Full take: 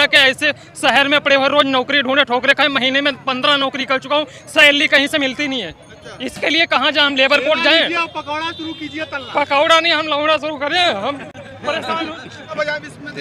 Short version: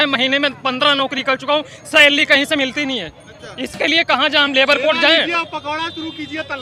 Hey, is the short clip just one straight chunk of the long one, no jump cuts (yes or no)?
yes